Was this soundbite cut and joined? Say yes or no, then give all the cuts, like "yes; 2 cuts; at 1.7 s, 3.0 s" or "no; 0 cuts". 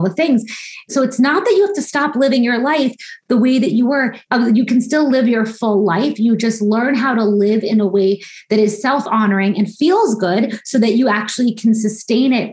yes; 2 cuts; at 0.9 s, 4.2 s